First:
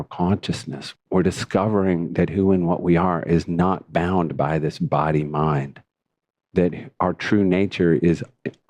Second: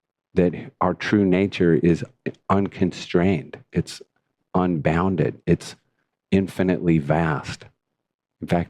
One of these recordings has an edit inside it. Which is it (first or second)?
first